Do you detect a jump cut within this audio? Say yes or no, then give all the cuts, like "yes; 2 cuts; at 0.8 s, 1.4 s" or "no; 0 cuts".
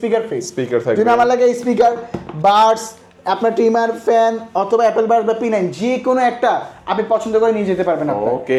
no; 0 cuts